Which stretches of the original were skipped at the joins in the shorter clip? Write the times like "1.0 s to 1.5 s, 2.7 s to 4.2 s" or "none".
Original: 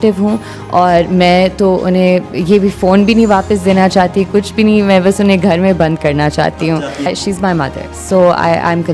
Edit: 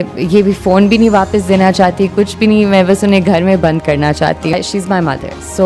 6.7 s to 7.0 s